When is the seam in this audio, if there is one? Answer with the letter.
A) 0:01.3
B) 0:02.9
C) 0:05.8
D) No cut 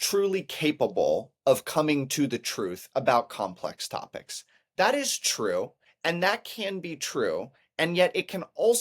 C